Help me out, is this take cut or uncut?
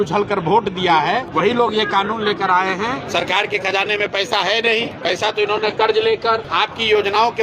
cut